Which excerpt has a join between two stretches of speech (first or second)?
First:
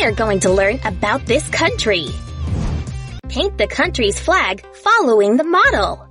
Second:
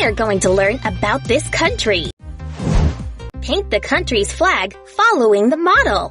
first